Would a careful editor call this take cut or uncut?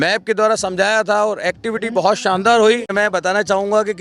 cut